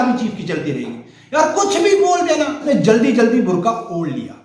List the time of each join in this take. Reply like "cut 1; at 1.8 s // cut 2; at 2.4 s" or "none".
cut 1; at 2.6 s